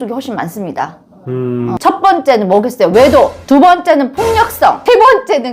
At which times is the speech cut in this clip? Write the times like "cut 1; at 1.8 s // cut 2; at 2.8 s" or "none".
cut 1; at 1.7 s